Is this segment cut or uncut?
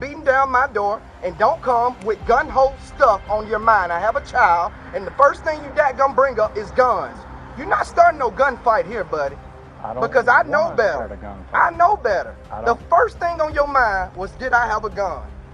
uncut